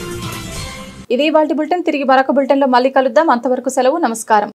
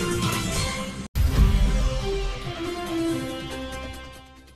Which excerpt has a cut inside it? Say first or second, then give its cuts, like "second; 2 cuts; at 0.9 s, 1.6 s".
second; 1 cut; at 1.0 s